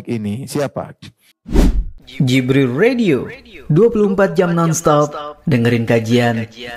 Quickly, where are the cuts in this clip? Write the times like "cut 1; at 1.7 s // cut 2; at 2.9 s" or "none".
cut 1; at 1.4 s